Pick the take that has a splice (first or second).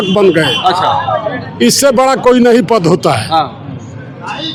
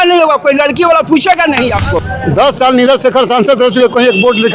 second